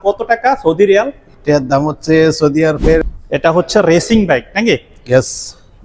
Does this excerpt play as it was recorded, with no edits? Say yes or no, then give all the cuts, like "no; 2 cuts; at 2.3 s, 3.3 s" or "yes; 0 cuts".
no; 1 cut; at 3.1 s